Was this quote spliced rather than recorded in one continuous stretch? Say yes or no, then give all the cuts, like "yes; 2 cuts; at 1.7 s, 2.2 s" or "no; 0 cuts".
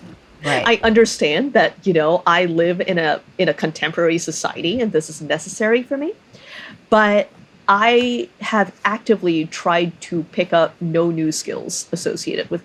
no; 0 cuts